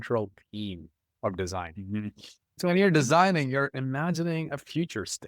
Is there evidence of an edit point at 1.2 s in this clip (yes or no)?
no